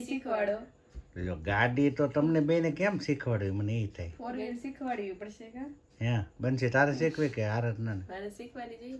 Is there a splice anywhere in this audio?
no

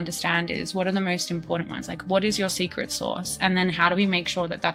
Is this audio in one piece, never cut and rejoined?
yes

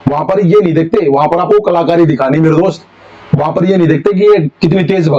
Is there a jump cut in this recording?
no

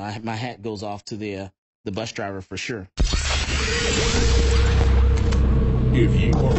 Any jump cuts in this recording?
yes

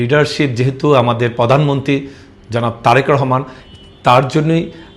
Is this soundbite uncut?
yes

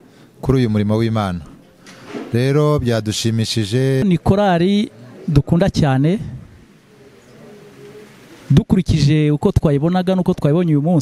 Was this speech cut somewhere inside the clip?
yes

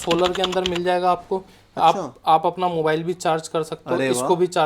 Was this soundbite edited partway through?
no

